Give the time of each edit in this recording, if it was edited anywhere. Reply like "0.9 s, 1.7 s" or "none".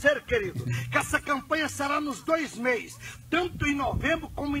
none

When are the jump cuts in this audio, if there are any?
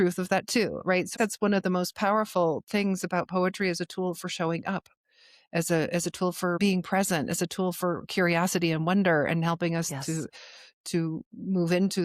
1.1 s, 6.6 s

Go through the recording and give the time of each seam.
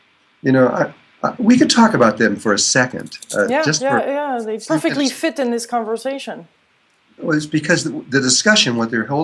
8.2 s

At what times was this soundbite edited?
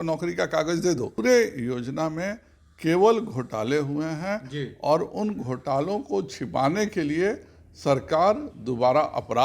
1.2 s

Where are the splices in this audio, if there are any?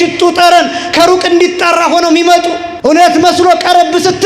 2.7 s

